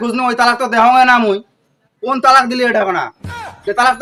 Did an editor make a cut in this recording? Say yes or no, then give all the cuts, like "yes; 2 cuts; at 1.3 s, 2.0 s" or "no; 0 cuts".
no; 0 cuts